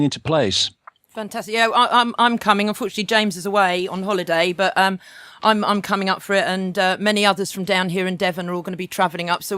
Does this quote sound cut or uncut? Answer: cut